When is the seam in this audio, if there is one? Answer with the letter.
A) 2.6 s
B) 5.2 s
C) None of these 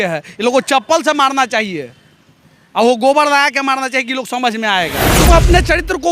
B